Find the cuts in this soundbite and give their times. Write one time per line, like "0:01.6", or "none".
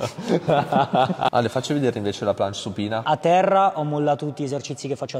0:01.3
0:03.0